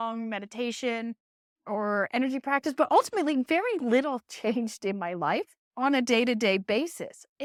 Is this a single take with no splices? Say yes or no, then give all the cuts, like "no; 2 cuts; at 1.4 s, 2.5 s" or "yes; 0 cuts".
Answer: yes; 0 cuts